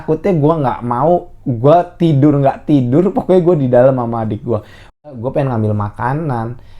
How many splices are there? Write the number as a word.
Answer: one